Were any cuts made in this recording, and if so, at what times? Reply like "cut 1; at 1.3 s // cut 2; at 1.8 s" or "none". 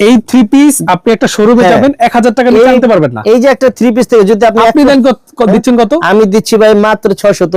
none